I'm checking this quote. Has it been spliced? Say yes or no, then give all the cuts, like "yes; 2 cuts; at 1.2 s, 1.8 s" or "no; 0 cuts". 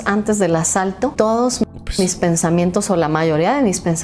yes; 1 cut; at 1.1 s